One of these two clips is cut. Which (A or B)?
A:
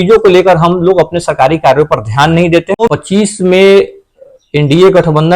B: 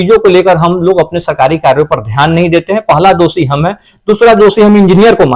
A